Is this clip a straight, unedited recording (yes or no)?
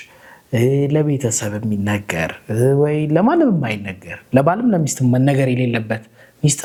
yes